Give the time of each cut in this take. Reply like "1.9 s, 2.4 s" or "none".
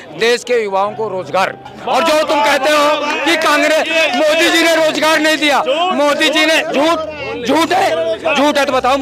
none